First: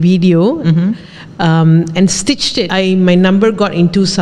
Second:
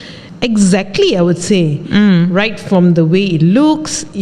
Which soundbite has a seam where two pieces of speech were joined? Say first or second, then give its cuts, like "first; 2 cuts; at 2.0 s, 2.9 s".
first; 1 cut; at 2.7 s